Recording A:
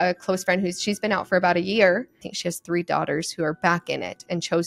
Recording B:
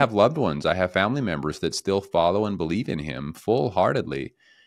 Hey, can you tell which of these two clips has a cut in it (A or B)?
A